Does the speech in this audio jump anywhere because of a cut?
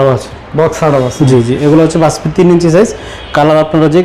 no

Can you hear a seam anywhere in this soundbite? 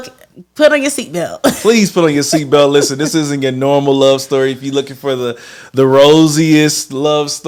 no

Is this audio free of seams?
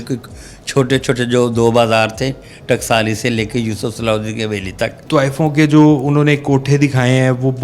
no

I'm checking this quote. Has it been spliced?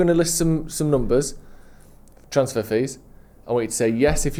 no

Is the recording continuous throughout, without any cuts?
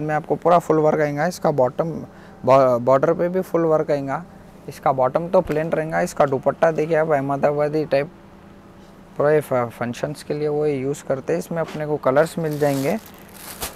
yes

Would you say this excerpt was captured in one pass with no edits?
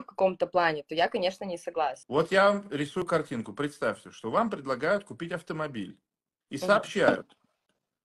no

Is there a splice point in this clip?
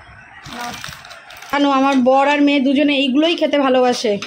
yes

